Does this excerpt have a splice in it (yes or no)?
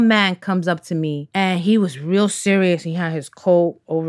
no